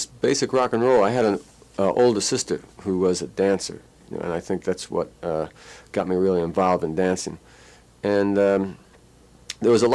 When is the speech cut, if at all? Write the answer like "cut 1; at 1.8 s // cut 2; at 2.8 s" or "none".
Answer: cut 1; at 1.8 s